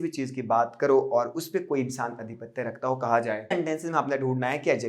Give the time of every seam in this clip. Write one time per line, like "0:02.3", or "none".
0:03.5

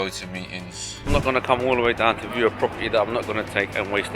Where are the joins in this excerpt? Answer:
0:01.1

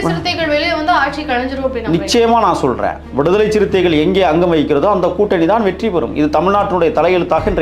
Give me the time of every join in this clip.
0:03.0

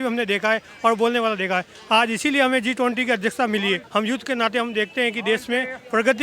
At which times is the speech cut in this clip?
0:03.8

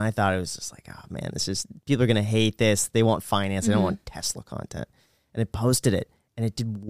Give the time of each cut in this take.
none

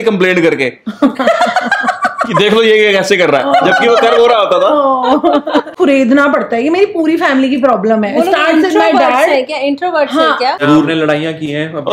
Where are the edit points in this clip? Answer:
0:05.7
0:10.6

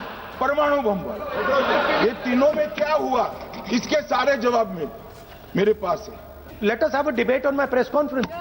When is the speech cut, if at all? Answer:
0:06.5

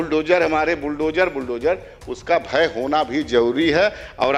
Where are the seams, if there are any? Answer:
none

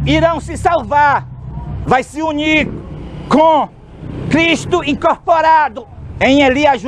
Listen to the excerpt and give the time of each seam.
none

